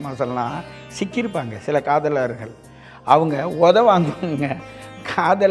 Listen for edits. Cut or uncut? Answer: uncut